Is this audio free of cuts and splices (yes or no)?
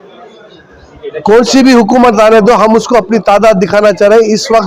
yes